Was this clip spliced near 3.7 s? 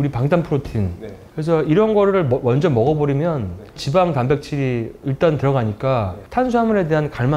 no; 1 cut; at 1.2 s

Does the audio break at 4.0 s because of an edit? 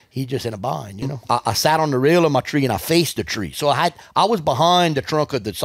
no; 1 cut; at 1.1 s

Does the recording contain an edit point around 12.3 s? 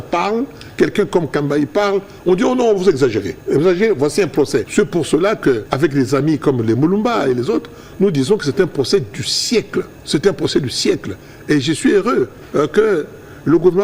no; 4 cuts; at 3.3 s, 4.7 s, 5.7 s, 10.0 s

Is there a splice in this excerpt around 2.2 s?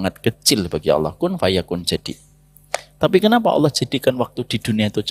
no; 0 cuts

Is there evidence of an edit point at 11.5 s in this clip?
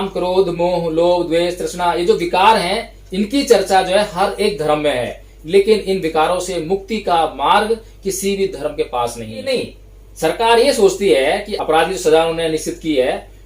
yes; 2 cuts; at 9.5 s, 11.5 s

